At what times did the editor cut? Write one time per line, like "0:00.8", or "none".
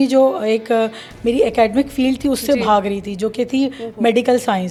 none